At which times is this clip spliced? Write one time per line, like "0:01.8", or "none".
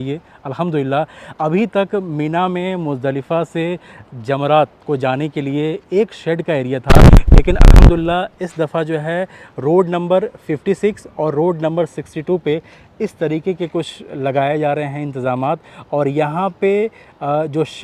none